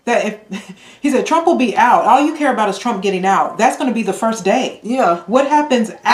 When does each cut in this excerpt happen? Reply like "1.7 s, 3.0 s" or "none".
none